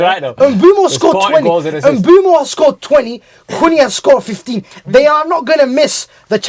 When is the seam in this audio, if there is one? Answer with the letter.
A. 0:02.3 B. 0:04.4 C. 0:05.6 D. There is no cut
D